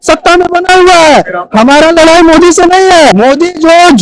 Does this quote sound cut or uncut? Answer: cut